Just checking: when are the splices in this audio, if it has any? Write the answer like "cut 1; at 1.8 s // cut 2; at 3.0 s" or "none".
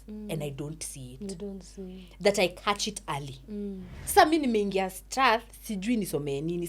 cut 1; at 3.9 s